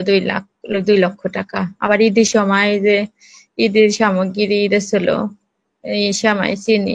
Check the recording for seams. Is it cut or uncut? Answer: uncut